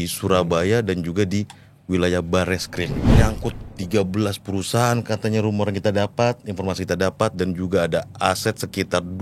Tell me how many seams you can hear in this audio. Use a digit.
1